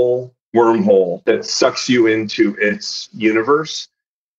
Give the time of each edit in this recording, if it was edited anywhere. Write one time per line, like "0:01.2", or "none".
0:01.2